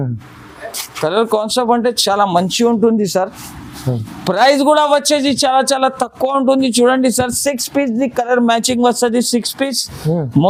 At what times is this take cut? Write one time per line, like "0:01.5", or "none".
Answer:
none